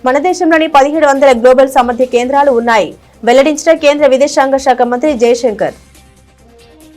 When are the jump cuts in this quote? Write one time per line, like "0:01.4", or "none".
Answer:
0:05.8